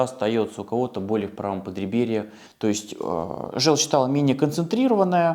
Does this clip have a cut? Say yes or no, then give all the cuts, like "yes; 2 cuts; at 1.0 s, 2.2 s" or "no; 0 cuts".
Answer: yes; 1 cut; at 2.4 s